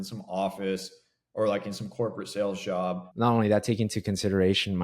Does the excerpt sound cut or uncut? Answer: cut